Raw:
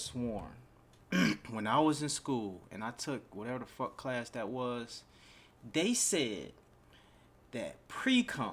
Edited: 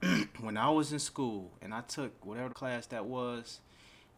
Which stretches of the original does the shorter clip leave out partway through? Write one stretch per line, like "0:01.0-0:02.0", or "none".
0:03.6-0:04.0